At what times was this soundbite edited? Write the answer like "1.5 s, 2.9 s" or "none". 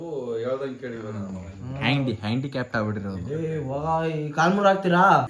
1.7 s